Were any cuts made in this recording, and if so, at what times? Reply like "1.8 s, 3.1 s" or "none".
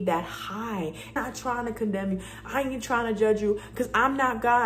1.2 s